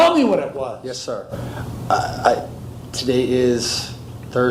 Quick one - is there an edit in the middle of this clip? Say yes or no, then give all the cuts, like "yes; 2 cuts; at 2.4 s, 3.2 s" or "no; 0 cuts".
no; 0 cuts